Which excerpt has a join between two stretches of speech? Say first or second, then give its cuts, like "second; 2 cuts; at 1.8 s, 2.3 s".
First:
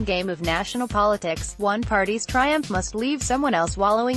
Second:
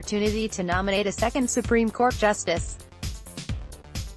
second; 1 cut; at 2.6 s